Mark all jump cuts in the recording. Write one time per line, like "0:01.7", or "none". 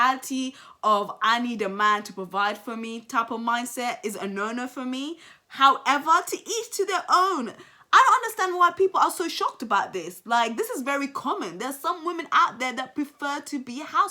none